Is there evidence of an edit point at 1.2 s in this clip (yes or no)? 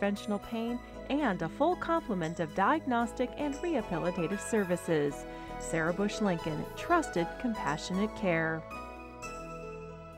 no